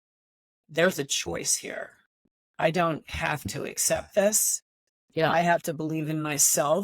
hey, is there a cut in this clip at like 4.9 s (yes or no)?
no